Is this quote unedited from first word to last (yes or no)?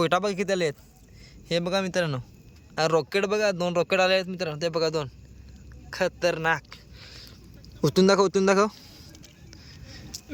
yes